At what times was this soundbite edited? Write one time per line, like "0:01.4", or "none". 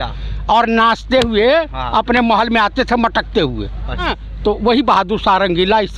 0:04.2